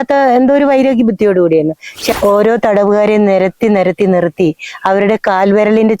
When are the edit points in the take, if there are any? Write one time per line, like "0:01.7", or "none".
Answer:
0:01.9